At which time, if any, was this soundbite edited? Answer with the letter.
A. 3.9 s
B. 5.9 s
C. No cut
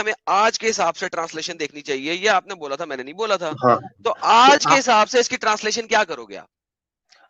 C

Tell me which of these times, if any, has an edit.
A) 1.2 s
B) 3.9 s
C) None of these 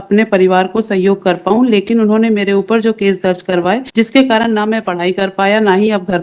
B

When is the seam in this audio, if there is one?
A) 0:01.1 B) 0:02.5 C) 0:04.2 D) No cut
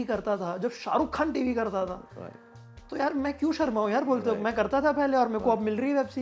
D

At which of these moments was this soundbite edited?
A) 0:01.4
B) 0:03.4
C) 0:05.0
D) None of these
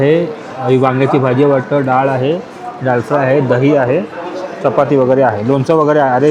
D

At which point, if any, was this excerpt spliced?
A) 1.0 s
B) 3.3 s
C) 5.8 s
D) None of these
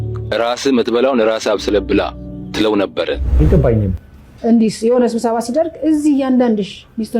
B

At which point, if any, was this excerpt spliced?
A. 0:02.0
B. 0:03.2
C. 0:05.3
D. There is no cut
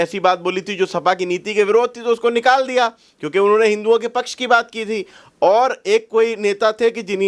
D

